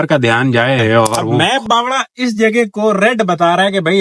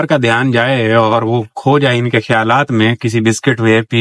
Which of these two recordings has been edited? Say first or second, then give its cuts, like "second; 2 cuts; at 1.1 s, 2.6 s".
first; 1 cut; at 1.3 s